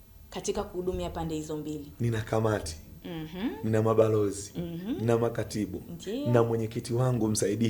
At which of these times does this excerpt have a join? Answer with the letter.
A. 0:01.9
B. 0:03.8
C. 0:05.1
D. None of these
A